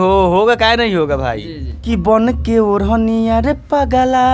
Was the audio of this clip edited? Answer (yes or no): yes